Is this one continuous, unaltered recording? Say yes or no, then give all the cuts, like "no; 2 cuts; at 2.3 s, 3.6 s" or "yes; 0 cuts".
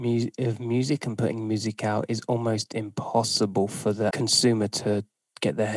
no; 1 cut; at 4.1 s